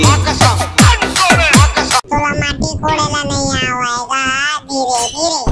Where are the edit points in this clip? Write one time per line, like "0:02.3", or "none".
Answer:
0:02.0